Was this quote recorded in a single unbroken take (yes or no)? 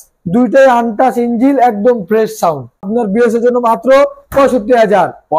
no